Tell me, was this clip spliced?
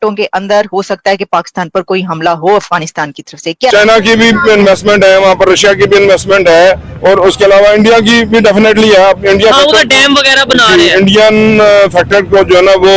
yes; 1 cut; at 3.7 s

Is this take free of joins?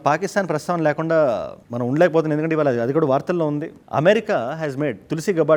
yes; 0 cuts

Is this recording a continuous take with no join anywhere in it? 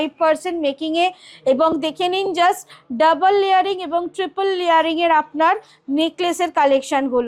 yes; 0 cuts

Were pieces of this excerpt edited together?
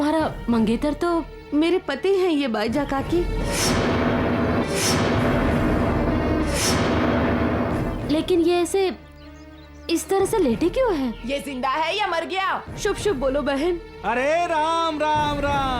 no; 0 cuts

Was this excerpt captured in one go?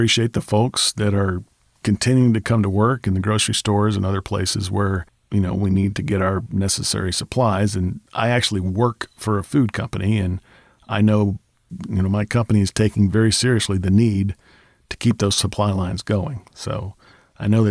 no; 2 cuts; at 5.1 s, 11.6 s

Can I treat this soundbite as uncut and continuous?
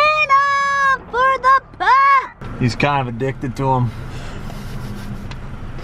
yes; 0 cuts

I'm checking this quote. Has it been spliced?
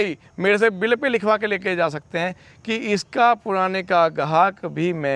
no; 0 cuts

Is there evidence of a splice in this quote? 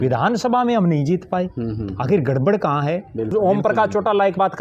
yes; 1 cut; at 3.3 s

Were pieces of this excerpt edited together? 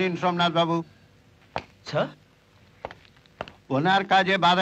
no; 0 cuts

